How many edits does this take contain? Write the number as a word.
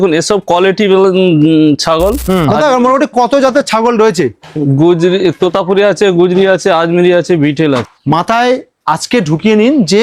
two